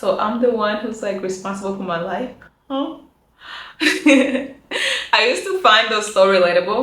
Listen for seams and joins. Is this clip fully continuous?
yes; 0 cuts

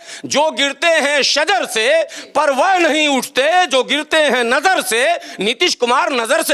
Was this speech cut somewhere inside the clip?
no; 0 cuts

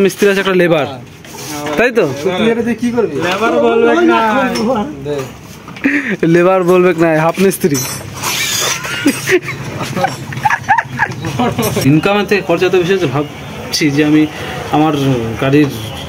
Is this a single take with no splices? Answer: no; 1 cut; at 11.8 s

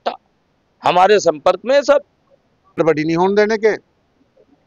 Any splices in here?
yes; 1 cut; at 2.8 s

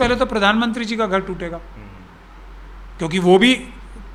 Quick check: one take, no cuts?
yes; 0 cuts

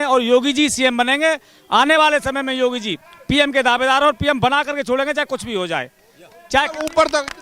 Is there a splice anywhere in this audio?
no; 0 cuts

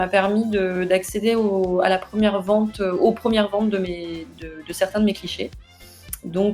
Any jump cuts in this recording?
no; 0 cuts

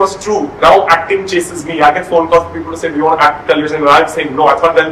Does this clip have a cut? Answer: no; 0 cuts

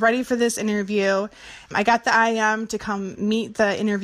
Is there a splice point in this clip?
yes; 1 cut; at 1.7 s

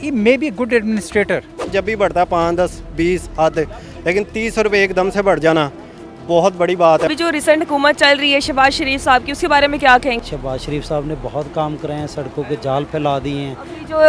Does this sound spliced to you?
yes; 3 cuts; at 1.7 s, 7.1 s, 10.2 s

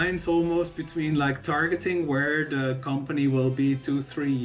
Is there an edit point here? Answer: no; 0 cuts

